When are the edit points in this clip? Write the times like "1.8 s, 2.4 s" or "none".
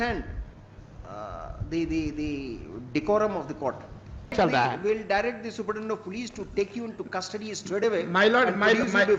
4.3 s